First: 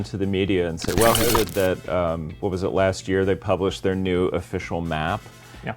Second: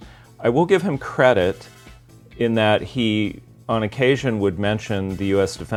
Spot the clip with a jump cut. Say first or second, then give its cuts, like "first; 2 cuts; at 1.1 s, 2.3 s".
first; 1 cut; at 1.4 s